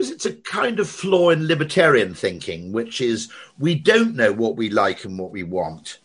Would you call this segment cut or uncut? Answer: uncut